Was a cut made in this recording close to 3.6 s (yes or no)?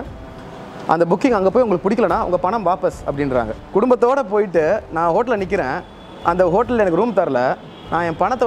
yes